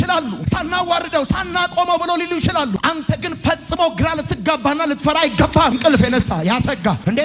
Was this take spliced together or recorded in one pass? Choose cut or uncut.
cut